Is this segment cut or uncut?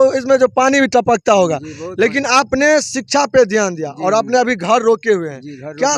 uncut